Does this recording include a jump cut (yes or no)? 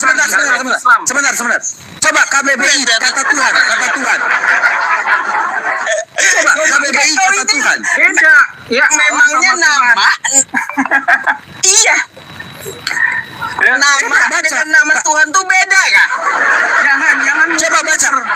no